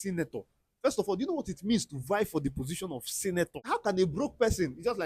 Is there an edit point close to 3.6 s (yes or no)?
yes